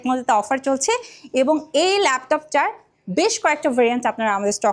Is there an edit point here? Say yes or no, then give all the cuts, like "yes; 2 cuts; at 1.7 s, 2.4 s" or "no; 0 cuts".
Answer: no; 0 cuts